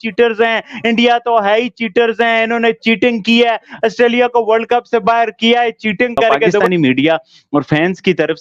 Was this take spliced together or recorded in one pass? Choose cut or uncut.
cut